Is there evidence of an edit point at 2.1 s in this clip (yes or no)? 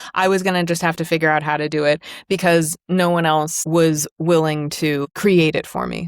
no